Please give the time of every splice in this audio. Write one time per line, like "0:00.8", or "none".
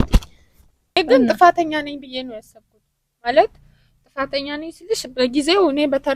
0:00.9